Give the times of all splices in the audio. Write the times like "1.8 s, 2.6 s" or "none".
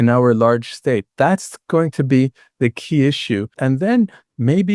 3.5 s